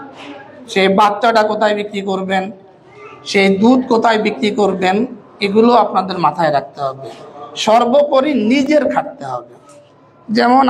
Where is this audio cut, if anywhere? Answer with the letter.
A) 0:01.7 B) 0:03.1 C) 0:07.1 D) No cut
D